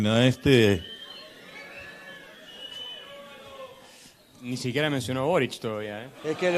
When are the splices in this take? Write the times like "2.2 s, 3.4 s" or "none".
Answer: none